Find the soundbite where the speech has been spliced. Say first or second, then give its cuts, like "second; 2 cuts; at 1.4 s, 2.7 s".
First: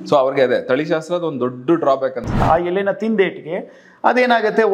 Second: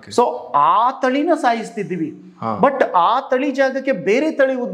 first; 1 cut; at 2.4 s